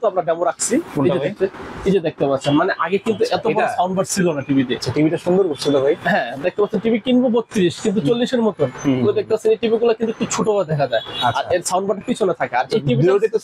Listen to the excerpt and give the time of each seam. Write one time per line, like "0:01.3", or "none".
none